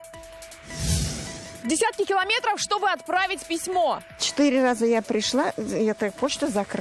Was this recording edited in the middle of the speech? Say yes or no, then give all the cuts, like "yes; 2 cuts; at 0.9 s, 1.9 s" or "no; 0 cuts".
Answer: yes; 2 cuts; at 0.8 s, 1.5 s